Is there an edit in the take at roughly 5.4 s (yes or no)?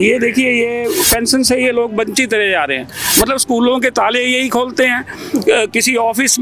no